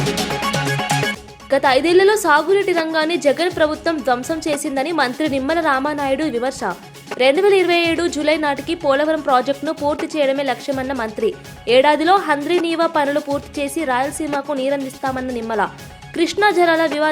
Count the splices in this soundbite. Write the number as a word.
one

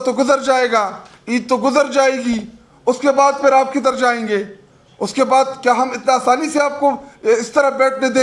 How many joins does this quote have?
zero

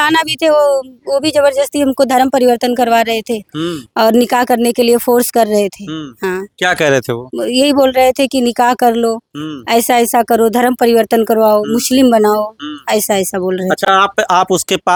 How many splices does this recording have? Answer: zero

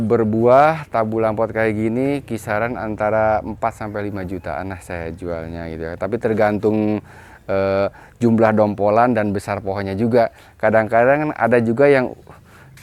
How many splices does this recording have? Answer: zero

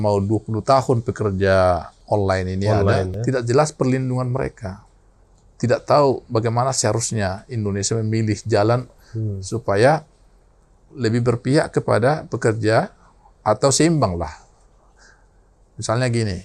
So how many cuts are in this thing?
one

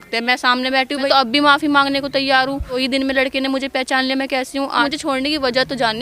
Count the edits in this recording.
three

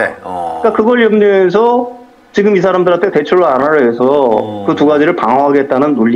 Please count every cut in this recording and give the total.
zero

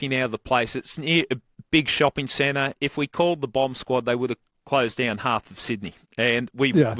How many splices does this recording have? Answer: two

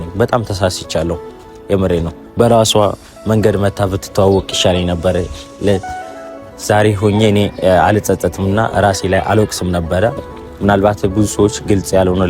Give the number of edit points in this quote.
one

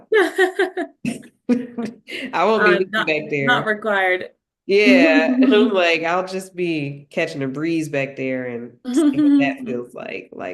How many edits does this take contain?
zero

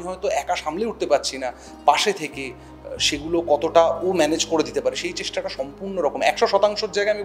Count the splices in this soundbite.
zero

